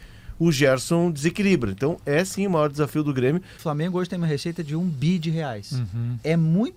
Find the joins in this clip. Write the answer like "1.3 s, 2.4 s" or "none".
3.5 s